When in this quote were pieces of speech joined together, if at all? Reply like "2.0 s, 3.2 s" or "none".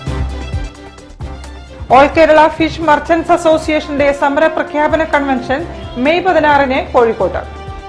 1.3 s